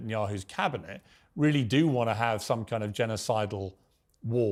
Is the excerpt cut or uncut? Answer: uncut